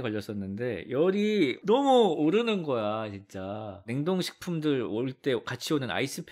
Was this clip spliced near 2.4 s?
no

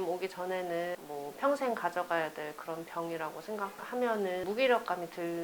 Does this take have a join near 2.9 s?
no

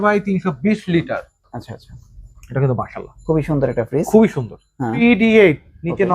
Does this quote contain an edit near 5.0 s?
yes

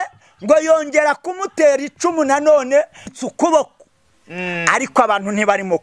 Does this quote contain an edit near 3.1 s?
yes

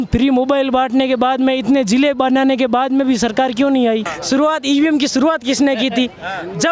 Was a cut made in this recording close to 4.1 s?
yes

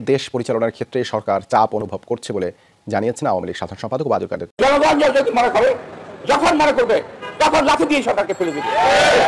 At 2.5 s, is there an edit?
no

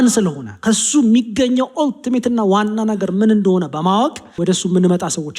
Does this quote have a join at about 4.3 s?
yes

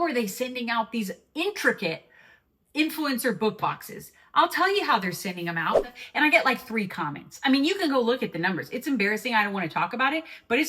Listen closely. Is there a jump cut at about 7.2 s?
no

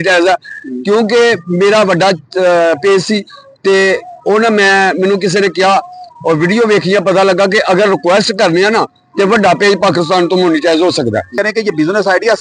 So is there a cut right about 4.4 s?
no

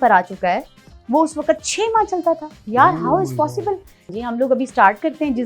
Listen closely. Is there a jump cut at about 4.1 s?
yes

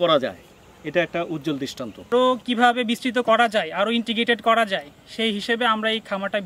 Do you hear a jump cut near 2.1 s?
yes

